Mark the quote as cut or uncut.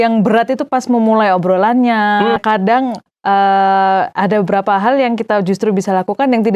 cut